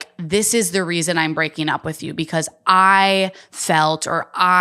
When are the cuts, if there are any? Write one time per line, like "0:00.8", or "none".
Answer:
none